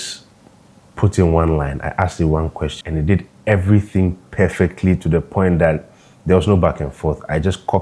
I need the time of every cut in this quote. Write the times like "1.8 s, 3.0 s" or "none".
2.8 s